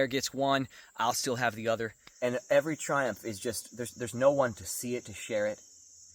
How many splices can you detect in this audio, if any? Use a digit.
1